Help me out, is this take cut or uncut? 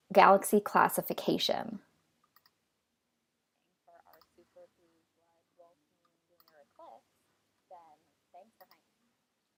uncut